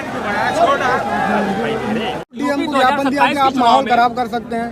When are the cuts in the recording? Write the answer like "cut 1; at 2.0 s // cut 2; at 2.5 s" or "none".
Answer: cut 1; at 2.3 s